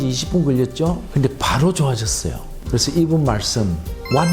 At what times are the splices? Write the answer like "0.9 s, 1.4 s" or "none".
none